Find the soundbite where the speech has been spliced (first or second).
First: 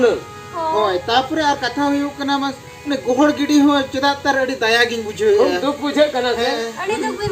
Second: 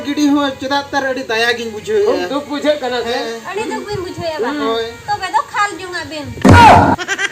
second